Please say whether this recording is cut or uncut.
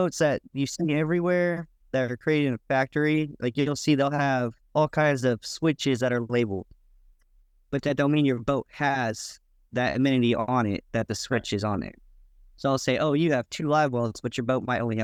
uncut